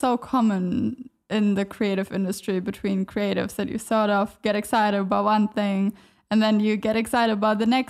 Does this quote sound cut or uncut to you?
uncut